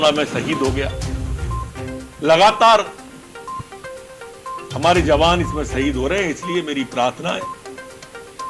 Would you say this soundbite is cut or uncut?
cut